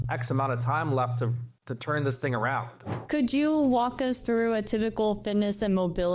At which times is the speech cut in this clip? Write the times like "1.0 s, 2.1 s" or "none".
2.9 s